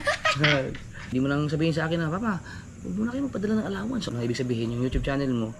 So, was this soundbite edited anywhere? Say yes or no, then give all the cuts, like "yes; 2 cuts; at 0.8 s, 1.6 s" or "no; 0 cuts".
yes; 2 cuts; at 1.1 s, 4.1 s